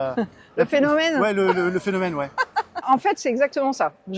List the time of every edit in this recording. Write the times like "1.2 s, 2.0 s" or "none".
2.8 s